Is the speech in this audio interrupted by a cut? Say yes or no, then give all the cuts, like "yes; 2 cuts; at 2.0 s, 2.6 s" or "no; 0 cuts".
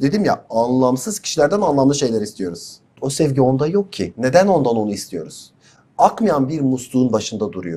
yes; 1 cut; at 3.0 s